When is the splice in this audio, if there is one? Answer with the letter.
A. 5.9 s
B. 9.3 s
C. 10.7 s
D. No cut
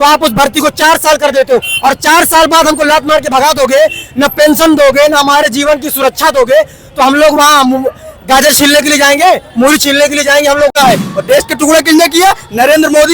C